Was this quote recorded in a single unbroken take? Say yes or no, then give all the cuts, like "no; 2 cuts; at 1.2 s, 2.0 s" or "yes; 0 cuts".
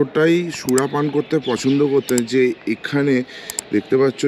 yes; 0 cuts